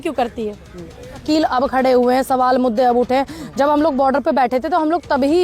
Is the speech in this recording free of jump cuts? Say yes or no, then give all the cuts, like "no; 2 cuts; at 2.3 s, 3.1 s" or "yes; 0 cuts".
no; 1 cut; at 1.2 s